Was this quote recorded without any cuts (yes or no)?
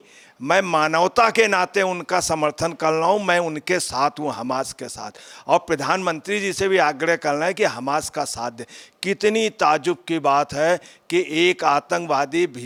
yes